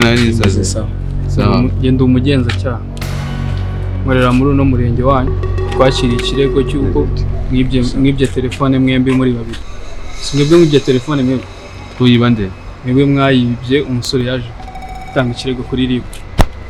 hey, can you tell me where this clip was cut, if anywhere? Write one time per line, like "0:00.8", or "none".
none